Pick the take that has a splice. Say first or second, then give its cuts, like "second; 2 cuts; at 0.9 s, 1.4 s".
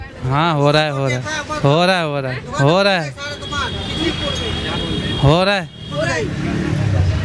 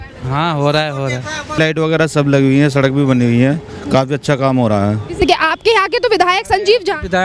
second; 2 cuts; at 1.6 s, 5.2 s